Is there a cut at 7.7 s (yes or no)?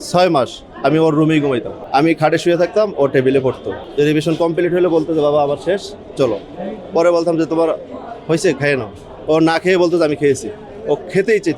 no